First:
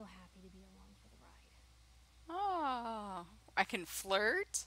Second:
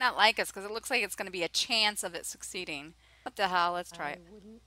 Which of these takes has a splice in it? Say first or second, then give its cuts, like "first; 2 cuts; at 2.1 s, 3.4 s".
second; 1 cut; at 3.0 s